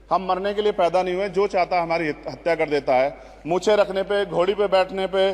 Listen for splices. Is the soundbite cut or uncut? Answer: uncut